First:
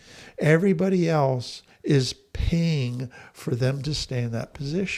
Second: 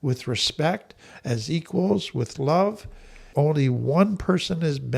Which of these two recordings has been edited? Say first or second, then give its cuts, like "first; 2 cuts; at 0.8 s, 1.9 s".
second; 1 cut; at 3.2 s